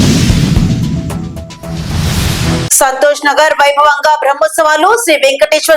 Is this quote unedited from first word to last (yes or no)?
yes